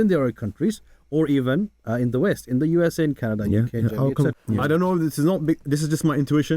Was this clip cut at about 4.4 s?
yes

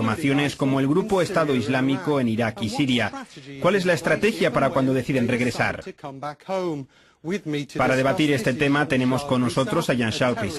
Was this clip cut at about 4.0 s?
yes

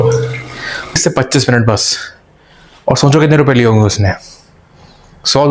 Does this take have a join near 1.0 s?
yes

